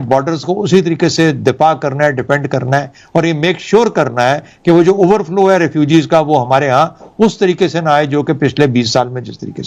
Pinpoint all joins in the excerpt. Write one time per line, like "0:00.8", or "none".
none